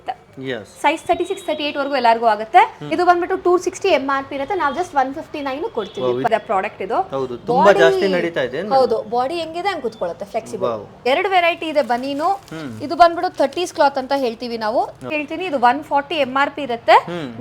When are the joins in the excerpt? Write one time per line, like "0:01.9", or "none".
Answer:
0:02.8
0:06.3
0:11.1
0:15.1